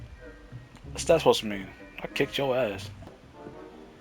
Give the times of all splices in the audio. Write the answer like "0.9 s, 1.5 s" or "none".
3.0 s